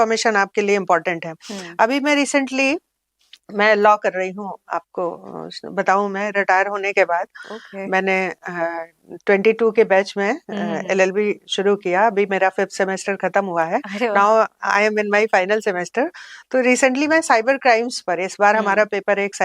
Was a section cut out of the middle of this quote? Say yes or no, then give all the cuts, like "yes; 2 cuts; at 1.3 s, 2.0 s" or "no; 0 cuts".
no; 0 cuts